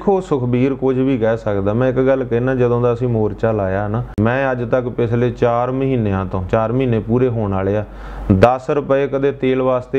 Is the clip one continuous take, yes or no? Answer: no